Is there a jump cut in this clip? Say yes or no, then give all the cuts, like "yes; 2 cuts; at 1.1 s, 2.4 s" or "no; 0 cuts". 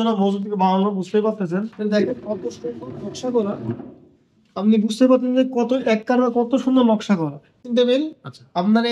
yes; 2 cuts; at 1.7 s, 7.6 s